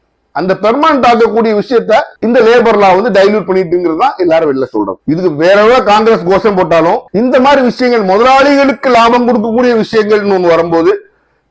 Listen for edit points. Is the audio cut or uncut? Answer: cut